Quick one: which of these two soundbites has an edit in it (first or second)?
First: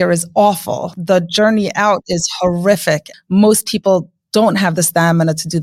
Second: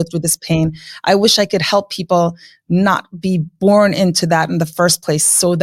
first